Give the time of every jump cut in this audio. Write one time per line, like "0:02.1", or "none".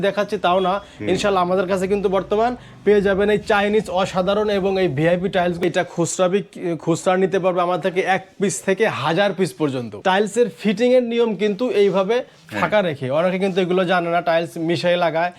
0:05.6
0:09.9